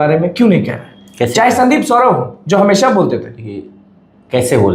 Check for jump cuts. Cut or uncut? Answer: uncut